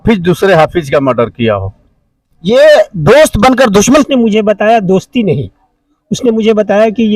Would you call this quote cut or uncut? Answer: cut